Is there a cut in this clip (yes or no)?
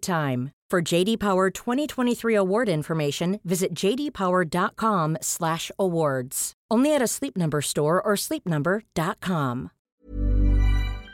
yes